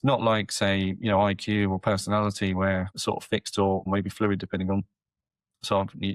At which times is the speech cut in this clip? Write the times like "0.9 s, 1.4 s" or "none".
2.9 s, 3.8 s